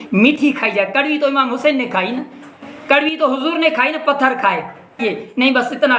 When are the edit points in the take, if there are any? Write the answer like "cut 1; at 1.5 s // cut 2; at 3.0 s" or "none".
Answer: cut 1; at 5.0 s